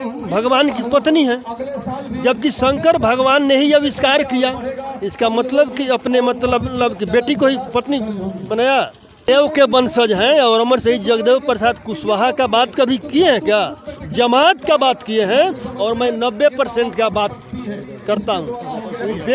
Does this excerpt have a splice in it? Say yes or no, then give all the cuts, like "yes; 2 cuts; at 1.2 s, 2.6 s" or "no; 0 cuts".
yes; 1 cut; at 9.3 s